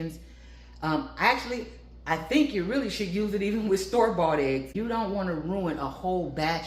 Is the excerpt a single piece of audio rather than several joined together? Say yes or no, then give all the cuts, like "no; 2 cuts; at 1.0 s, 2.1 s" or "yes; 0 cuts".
no; 1 cut; at 4.7 s